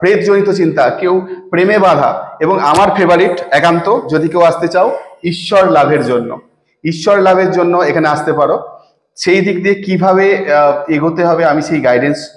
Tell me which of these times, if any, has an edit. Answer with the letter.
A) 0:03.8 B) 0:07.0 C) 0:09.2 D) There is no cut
D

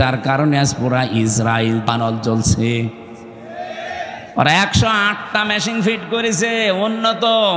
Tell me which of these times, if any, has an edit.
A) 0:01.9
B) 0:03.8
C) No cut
A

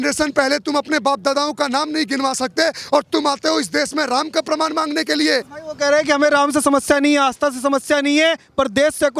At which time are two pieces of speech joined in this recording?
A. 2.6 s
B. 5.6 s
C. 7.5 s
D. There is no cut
B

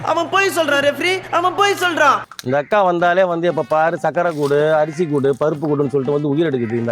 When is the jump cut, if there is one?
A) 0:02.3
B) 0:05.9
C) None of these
A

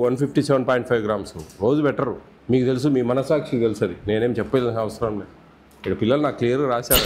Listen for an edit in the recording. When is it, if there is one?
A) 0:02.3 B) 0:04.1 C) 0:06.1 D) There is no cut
A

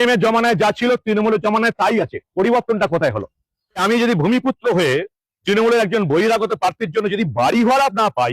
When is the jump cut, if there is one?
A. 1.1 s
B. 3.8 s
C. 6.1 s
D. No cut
B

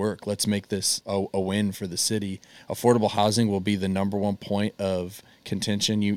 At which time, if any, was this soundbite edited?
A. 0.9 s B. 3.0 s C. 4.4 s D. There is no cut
A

